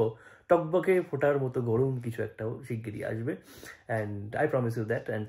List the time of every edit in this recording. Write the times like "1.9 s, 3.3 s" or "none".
none